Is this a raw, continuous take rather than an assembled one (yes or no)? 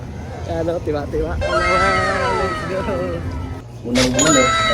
no